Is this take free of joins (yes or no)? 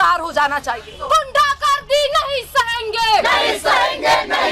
no